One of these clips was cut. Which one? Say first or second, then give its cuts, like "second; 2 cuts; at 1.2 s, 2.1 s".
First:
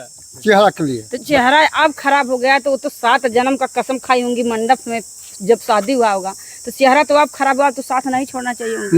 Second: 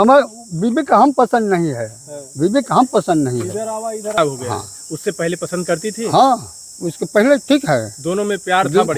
second; 1 cut; at 4.2 s